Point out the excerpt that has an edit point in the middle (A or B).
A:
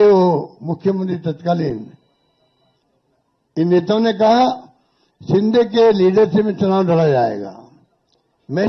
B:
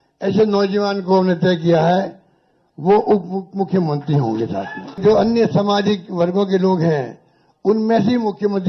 B